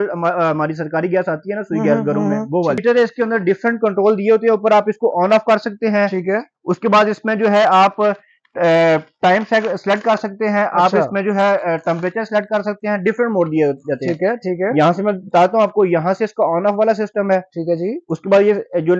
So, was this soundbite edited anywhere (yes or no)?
yes